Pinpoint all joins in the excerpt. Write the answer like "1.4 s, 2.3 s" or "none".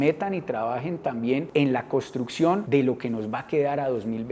1.5 s, 2.6 s